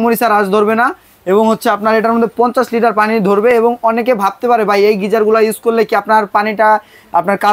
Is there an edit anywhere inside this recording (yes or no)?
no